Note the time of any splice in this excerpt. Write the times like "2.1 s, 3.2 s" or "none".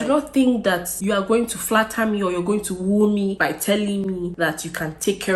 0.9 s, 3.4 s, 4.3 s